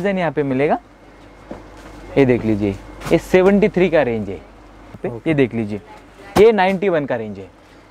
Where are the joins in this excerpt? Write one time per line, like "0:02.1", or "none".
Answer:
0:05.0